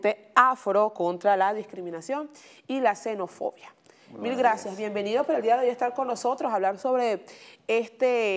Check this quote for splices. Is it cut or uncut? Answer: uncut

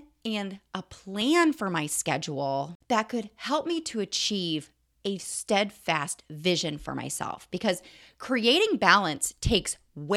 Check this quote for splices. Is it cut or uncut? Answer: cut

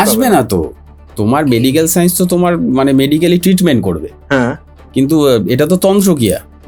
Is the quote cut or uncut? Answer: uncut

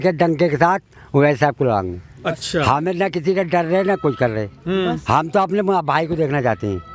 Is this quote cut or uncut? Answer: uncut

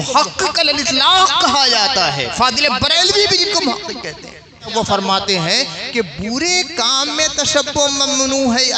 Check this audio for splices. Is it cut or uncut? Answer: cut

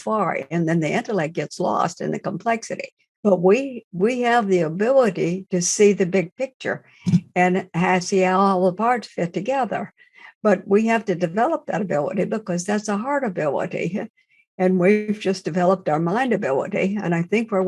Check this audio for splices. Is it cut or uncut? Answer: cut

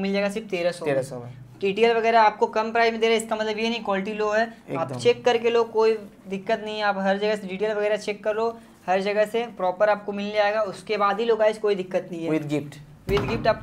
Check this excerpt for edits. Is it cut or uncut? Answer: uncut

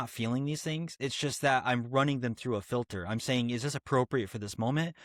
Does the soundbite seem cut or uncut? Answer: uncut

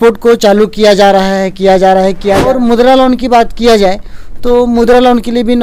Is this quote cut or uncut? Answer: cut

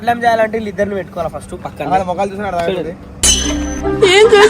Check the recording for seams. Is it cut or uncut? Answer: cut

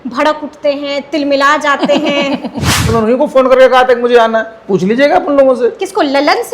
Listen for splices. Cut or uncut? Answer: cut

